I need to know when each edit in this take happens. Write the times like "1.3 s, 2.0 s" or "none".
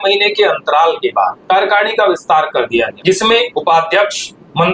1.4 s, 3.3 s